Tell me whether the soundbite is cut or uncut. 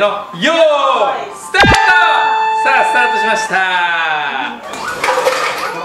uncut